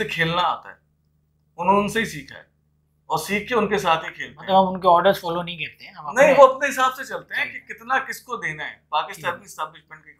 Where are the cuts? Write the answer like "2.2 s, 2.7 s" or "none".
none

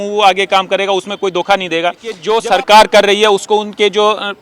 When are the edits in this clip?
2.2 s

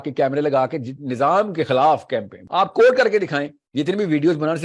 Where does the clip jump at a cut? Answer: 2.4 s, 3.6 s

